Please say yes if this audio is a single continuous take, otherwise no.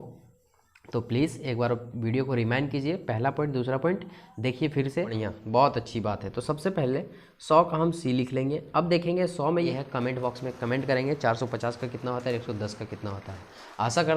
no